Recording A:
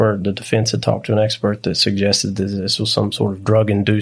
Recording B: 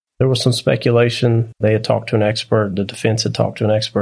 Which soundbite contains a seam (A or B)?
B